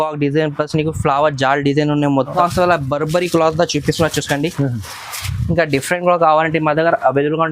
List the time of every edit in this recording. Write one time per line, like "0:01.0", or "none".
0:02.4